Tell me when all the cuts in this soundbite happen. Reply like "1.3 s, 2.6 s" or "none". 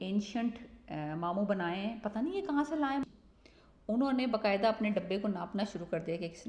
3.0 s